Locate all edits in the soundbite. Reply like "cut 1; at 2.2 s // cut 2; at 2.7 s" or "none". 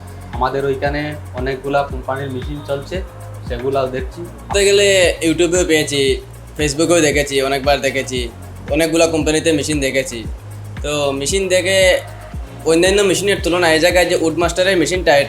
cut 1; at 4.5 s